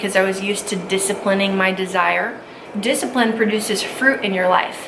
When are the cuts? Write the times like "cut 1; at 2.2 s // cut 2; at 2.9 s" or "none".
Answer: cut 1; at 2.6 s